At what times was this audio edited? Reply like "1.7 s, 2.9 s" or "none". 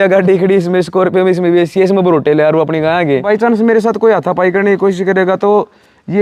3.2 s